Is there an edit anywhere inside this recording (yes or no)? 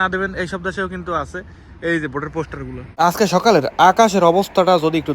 yes